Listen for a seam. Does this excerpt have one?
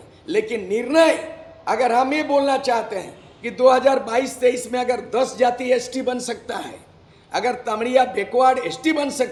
no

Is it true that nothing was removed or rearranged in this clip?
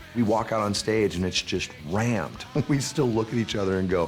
no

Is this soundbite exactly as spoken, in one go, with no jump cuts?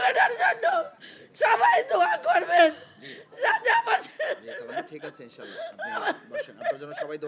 yes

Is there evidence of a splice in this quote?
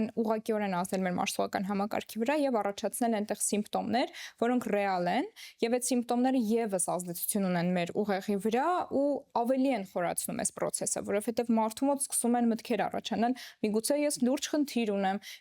no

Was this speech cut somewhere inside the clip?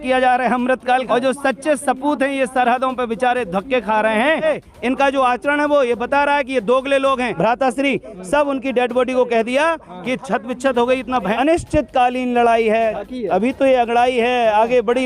yes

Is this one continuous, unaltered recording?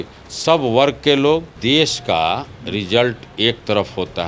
no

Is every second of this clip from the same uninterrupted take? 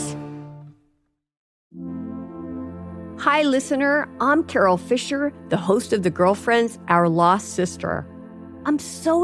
no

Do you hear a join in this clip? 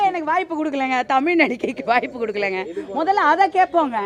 no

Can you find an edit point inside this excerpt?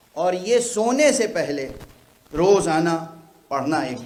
no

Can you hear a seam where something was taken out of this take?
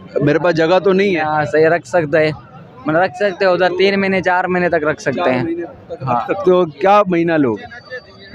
no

